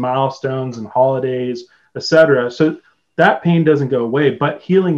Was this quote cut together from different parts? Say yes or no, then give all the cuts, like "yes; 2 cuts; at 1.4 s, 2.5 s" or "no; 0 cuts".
no; 0 cuts